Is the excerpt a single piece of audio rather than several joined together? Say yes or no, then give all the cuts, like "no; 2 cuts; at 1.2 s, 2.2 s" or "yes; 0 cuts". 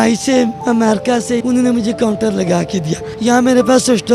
no; 2 cuts; at 0.8 s, 3.1 s